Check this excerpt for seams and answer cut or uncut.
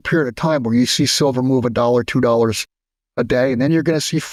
uncut